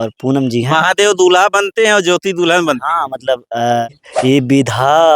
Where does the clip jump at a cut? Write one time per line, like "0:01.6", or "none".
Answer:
0:03.9